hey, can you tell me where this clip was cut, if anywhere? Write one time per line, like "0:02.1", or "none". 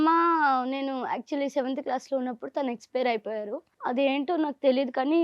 0:03.7